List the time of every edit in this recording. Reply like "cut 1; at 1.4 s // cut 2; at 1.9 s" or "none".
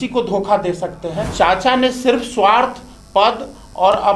cut 1; at 1.2 s